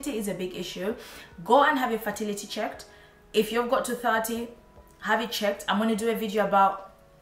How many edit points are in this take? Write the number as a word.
zero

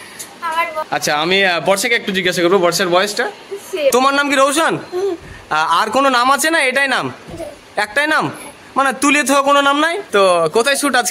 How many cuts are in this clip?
three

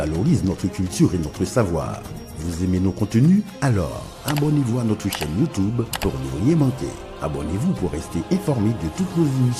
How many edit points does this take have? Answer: zero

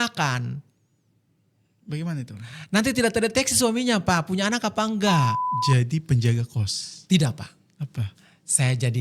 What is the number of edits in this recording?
one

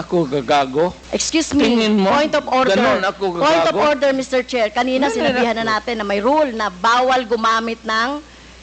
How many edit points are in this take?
one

